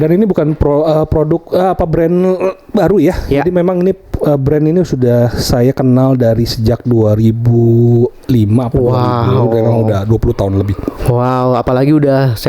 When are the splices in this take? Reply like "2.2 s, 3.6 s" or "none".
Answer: none